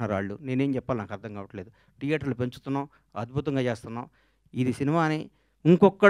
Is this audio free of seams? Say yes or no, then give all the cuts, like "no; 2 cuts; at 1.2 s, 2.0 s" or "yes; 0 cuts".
yes; 0 cuts